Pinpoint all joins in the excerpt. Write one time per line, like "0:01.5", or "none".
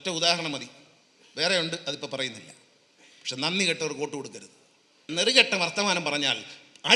0:05.1